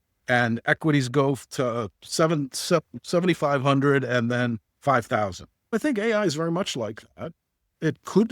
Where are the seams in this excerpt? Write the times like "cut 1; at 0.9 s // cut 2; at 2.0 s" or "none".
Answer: cut 1; at 5.7 s